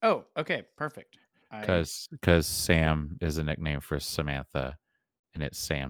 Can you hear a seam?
yes; 1 cut; at 1.6 s

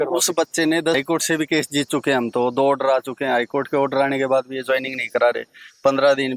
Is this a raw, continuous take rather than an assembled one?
no; 1 cut; at 1.0 s

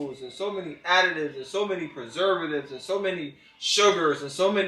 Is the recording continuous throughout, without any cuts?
yes; 0 cuts

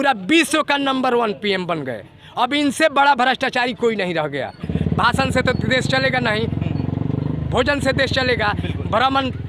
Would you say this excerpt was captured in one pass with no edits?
no; 1 cut; at 4.6 s

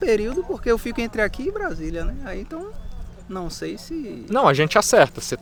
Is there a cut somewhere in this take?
no; 0 cuts

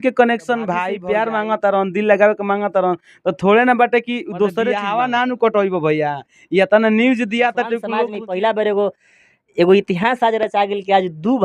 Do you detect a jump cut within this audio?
yes; 3 cuts; at 0.9 s, 4.7 s, 8.1 s

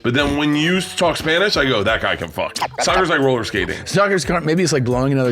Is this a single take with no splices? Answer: no; 1 cut; at 2.7 s

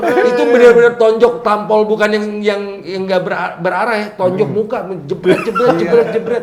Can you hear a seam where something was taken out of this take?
no; 0 cuts

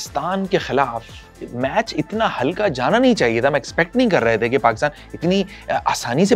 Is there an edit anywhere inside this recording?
no; 0 cuts

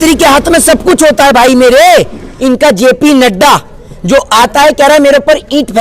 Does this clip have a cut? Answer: yes; 1 cut; at 2.3 s

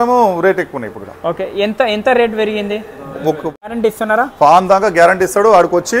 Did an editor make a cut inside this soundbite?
yes; 1 cut; at 3.7 s

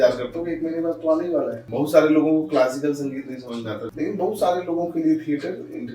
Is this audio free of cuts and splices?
no; 2 cuts; at 1.6 s, 3.9 s

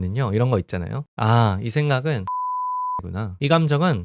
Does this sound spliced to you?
yes; 1 cut; at 2.7 s

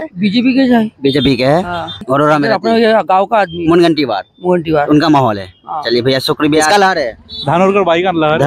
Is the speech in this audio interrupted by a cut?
yes; 2 cuts; at 1.8 s, 6.6 s

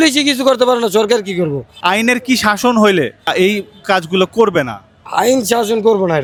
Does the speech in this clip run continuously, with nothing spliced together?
yes; 0 cuts

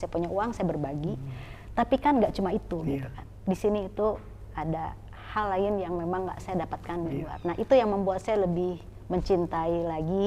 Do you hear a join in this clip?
no; 0 cuts

